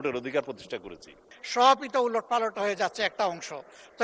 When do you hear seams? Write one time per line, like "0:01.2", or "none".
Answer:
0:01.2